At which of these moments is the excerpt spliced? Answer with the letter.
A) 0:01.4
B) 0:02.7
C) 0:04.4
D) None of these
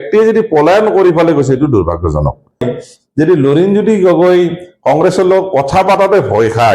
B